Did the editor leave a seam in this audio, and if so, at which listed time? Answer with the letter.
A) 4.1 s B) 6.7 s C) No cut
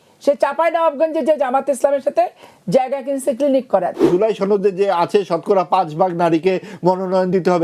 A